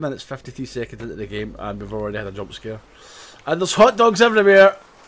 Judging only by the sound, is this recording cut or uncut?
uncut